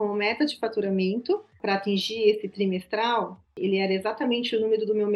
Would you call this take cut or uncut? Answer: cut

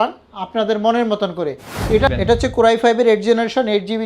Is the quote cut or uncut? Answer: cut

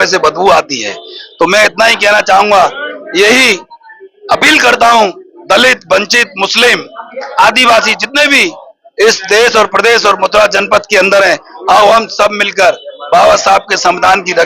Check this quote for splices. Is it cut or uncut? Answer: uncut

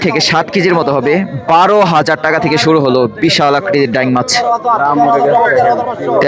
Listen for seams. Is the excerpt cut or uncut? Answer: uncut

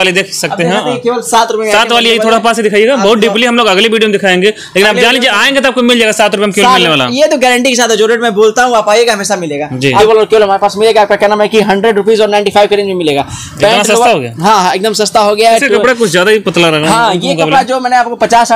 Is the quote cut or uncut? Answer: cut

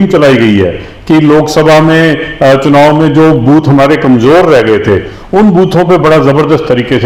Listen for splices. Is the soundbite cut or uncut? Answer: uncut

